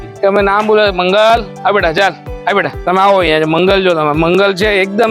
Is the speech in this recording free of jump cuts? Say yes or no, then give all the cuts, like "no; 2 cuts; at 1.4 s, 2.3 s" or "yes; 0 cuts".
yes; 0 cuts